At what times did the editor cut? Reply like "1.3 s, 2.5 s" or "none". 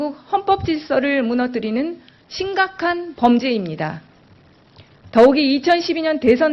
none